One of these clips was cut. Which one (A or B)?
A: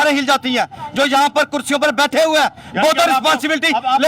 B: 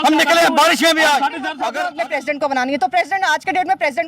B